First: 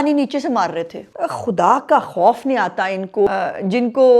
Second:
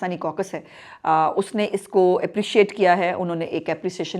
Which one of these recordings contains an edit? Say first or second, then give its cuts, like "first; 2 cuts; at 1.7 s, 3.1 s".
first; 2 cuts; at 1.0 s, 3.3 s